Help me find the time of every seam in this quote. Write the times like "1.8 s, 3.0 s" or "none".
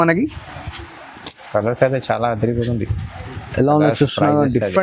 none